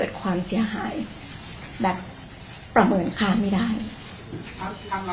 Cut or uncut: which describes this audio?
uncut